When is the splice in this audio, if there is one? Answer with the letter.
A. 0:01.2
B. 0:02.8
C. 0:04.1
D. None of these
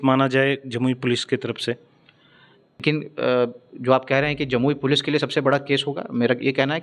B